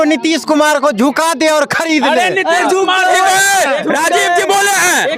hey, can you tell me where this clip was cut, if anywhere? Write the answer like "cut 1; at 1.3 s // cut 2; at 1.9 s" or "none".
none